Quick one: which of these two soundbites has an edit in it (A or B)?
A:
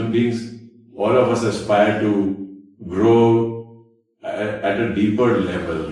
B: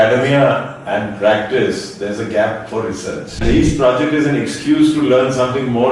B